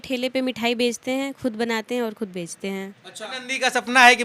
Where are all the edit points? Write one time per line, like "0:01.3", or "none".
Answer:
0:03.2